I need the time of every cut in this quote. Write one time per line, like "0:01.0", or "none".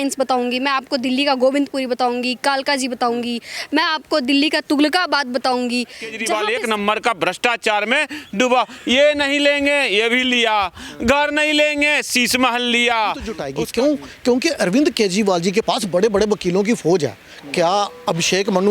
0:06.1
0:13.5